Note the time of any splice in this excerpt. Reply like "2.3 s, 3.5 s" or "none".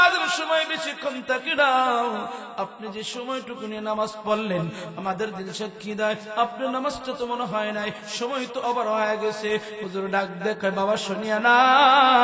none